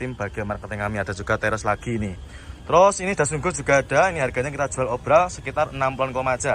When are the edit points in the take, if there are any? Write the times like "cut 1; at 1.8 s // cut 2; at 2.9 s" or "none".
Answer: cut 1; at 1.4 s